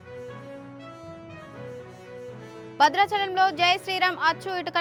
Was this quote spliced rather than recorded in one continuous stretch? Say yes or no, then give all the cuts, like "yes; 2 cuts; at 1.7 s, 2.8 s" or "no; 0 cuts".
no; 0 cuts